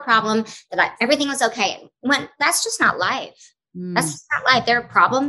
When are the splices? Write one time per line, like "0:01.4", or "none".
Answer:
none